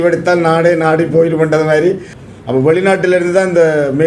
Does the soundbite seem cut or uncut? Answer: cut